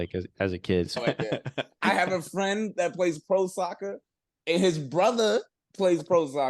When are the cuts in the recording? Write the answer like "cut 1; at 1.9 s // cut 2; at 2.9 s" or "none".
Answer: cut 1; at 1.0 s

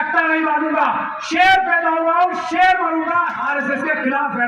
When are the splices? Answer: cut 1; at 3.4 s

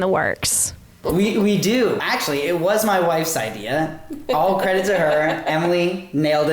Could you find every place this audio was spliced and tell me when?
cut 1; at 1.0 s // cut 2; at 2.0 s

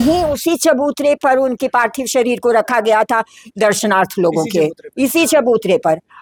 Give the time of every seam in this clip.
none

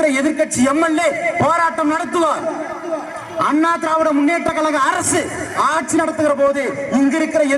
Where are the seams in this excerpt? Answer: none

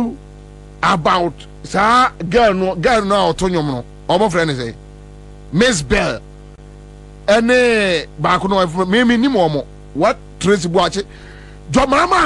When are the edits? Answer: none

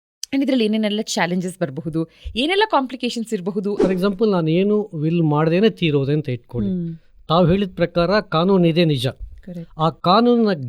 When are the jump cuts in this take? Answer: cut 1; at 3.8 s

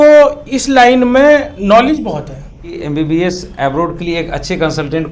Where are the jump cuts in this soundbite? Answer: cut 1; at 2.8 s

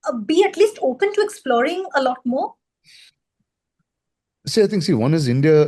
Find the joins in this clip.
none

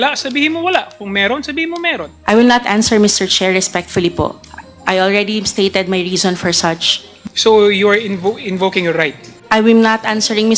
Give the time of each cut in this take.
cut 1; at 9.3 s

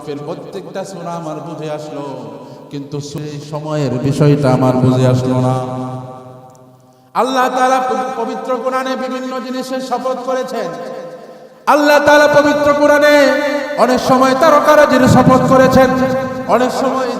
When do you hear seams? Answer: cut 1; at 3.2 s

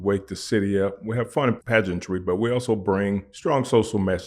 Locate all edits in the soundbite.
cut 1; at 1.6 s // cut 2; at 3.3 s

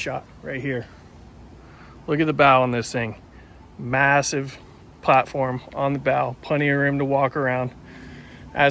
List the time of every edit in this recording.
none

